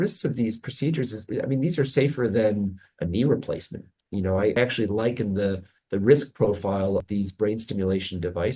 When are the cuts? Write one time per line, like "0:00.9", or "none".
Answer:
0:04.6
0:07.1